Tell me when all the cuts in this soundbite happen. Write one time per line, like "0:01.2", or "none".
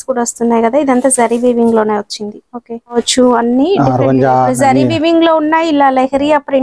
0:02.9